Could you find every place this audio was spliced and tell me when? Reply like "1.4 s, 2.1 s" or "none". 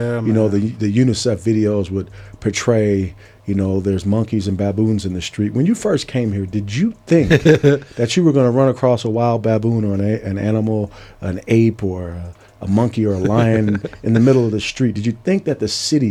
none